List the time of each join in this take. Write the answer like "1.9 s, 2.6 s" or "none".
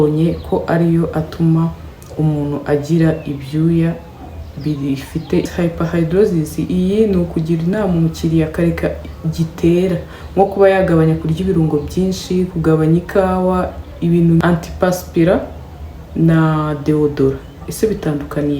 5.5 s